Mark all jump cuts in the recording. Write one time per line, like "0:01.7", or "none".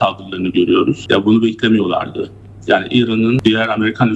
0:01.0
0:03.4